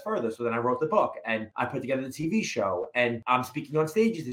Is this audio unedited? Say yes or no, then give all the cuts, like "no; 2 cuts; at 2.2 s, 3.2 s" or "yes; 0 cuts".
no; 2 cuts; at 1.5 s, 3.2 s